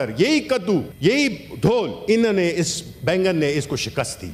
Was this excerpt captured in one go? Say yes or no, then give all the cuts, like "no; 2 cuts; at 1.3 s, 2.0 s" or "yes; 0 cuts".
no; 2 cuts; at 0.9 s, 2.0 s